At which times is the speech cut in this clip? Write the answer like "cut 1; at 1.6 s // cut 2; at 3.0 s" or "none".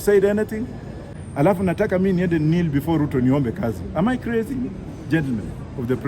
cut 1; at 1.1 s